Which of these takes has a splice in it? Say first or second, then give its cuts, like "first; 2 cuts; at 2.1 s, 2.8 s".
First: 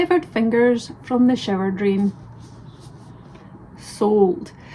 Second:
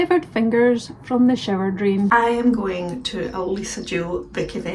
second; 1 cut; at 2.1 s